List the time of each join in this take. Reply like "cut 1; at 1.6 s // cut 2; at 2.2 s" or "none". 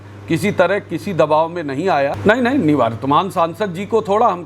cut 1; at 2.2 s